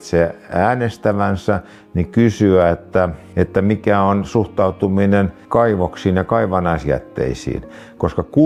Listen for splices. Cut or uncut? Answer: uncut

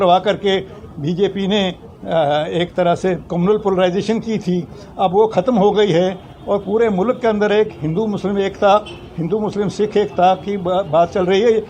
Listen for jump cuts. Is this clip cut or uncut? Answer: uncut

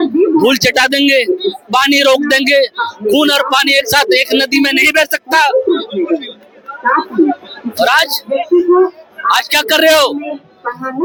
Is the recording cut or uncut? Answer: uncut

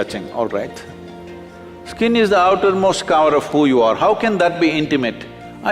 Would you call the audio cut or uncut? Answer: uncut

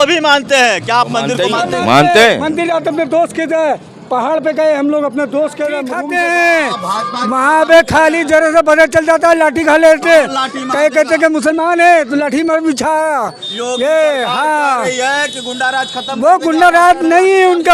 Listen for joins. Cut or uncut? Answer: cut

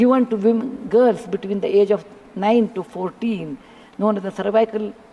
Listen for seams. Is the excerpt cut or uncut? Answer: uncut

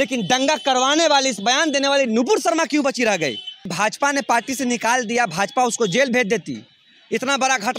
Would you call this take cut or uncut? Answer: cut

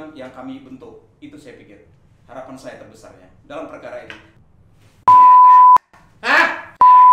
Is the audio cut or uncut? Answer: cut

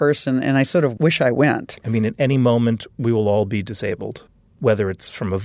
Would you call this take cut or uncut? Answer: cut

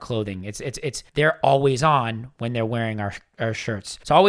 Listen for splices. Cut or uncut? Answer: cut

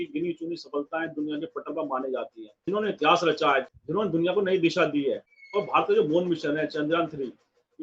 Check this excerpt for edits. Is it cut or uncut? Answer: cut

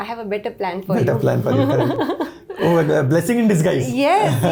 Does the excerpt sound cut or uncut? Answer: uncut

